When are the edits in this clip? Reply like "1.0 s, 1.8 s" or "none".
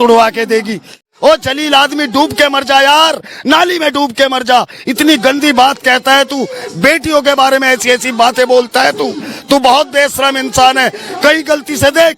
1.1 s